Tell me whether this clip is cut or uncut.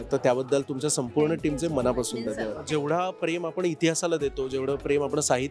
cut